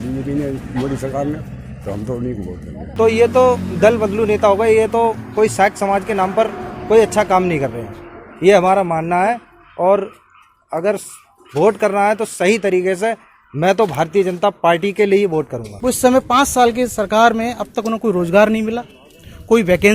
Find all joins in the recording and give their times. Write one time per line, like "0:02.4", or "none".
0:02.8
0:15.6